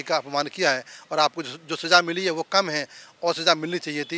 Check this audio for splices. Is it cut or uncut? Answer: uncut